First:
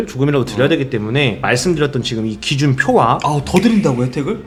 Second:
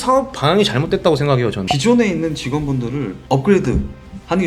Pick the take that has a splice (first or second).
second